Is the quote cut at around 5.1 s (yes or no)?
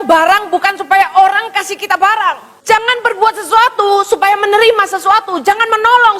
no